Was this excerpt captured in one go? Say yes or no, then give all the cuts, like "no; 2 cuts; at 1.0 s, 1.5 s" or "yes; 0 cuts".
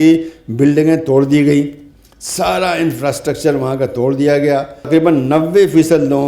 no; 1 cut; at 4.9 s